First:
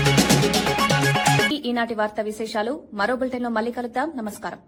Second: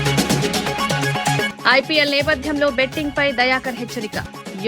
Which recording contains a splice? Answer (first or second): second